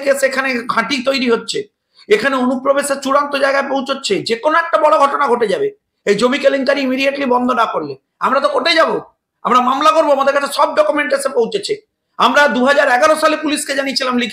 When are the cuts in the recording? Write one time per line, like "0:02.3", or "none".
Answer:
none